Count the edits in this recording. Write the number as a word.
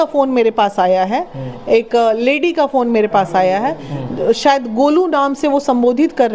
zero